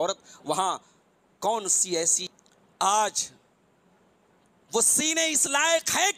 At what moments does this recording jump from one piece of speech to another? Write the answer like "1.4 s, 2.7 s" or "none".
2.3 s